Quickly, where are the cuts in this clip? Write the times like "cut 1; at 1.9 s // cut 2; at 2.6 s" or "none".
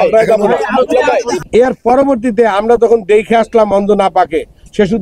cut 1; at 1.3 s